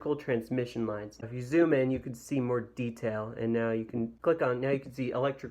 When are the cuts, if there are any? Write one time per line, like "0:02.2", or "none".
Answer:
0:01.2
0:04.1